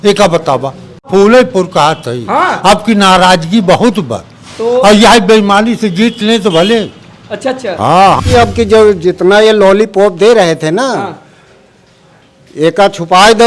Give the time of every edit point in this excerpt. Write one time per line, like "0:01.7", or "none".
0:01.1
0:08.2

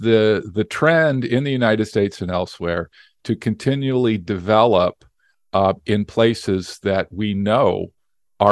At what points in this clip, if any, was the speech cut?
none

